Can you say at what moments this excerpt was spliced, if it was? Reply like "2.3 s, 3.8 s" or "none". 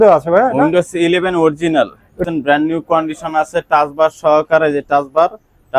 2.2 s

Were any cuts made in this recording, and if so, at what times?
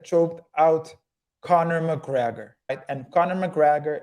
2.8 s

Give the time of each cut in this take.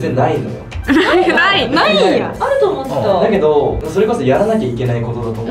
none

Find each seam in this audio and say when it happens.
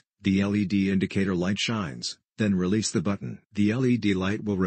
3.4 s

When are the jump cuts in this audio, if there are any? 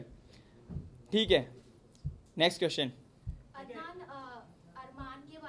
none

